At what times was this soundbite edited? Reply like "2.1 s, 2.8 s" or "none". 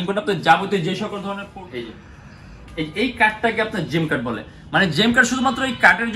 1.4 s